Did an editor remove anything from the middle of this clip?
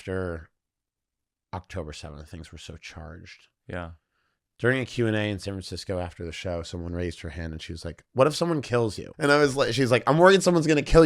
yes; 1 cut; at 9.0 s

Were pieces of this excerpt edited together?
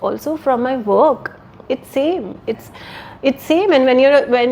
no; 0 cuts

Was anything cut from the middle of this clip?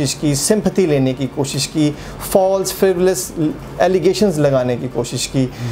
no; 0 cuts

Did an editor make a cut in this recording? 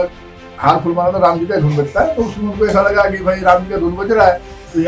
no; 0 cuts

